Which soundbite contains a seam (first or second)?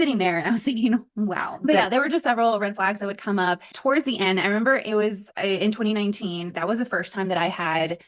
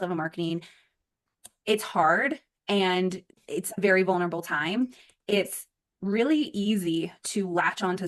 first